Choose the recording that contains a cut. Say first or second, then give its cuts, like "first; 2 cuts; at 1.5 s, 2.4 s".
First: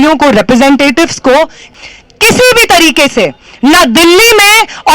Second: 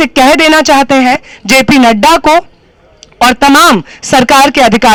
first; 1 cut; at 1.6 s